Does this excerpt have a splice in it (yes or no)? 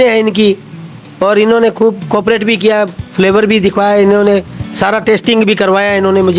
no